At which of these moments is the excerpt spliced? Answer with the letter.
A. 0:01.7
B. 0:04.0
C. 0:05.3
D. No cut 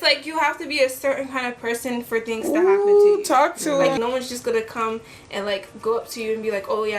B